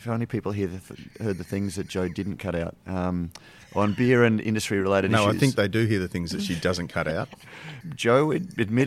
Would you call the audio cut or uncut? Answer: cut